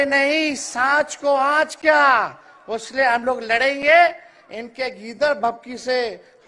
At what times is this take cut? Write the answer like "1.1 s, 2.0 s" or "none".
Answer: none